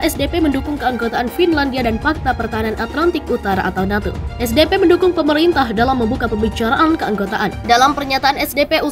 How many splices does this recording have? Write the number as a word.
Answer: one